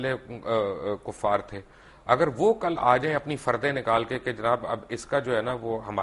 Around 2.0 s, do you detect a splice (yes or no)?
no